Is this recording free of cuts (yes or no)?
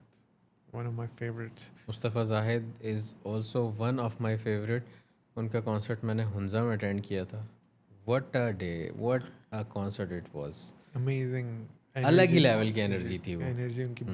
yes